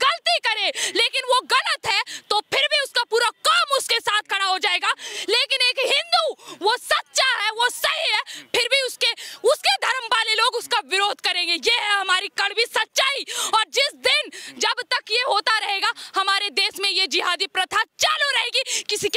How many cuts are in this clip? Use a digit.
0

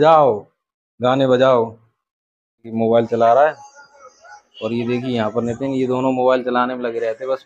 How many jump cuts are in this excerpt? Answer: 1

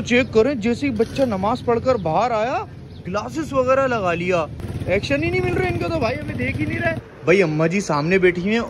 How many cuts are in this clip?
2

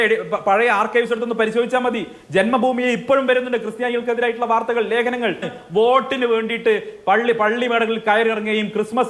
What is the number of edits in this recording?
1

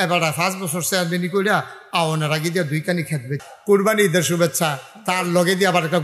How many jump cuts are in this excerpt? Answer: 1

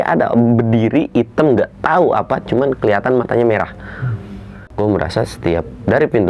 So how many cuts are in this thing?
1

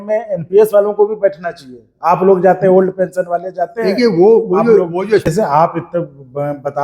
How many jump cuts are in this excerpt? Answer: 1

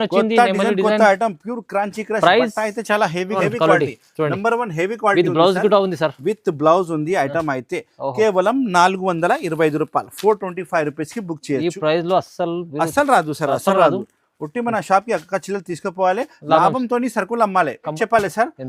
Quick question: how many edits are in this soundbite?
2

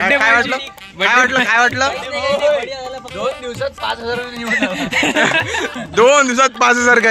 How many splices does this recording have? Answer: 0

